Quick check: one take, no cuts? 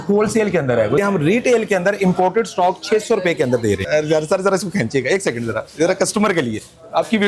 no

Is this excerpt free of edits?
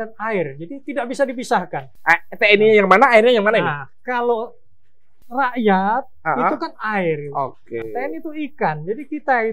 yes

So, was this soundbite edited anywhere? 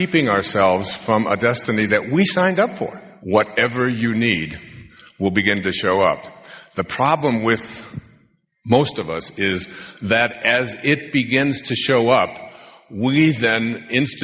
yes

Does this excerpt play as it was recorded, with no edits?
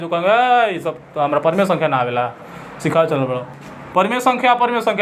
yes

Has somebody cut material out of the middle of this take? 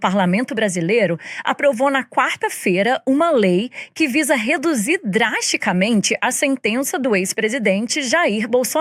no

